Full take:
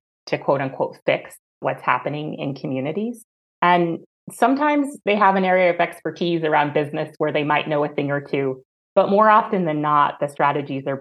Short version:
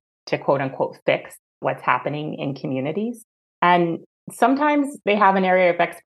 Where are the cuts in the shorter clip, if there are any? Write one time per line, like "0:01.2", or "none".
none